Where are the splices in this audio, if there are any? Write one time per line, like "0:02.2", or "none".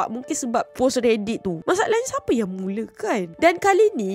0:01.5